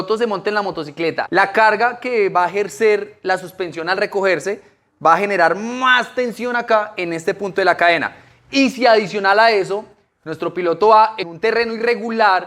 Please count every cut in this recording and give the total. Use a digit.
2